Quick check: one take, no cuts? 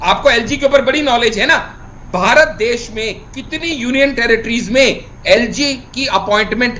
yes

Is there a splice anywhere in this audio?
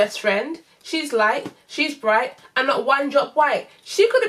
no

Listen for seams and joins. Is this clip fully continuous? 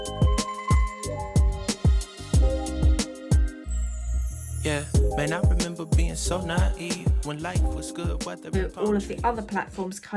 no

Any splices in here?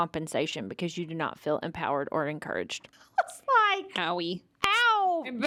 no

